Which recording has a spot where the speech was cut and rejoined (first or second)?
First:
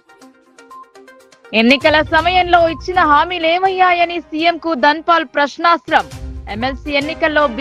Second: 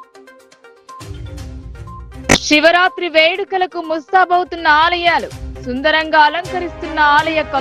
first